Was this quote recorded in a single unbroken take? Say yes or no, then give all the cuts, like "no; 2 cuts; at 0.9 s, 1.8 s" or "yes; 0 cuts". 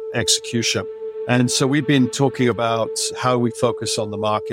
no; 2 cuts; at 1.1 s, 3.0 s